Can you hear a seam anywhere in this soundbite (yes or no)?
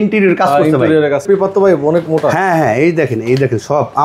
yes